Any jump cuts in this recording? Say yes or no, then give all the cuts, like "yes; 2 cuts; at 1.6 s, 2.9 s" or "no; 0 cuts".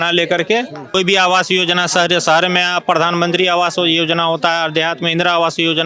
yes; 1 cut; at 1.0 s